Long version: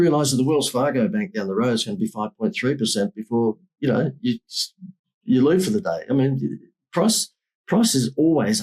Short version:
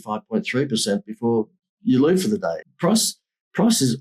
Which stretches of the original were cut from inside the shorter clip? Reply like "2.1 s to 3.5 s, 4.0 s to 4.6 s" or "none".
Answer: 3.7 s to 5.0 s, 6.0 s to 6.7 s